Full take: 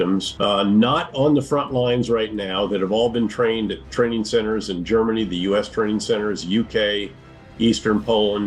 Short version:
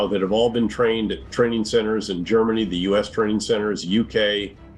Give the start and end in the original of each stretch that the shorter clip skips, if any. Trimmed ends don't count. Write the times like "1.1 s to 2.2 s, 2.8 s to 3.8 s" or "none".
none